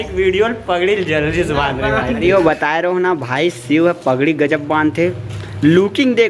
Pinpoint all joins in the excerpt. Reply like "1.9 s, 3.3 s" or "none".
2.2 s